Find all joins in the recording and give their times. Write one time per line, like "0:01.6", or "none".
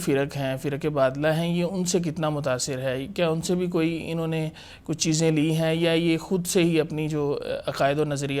none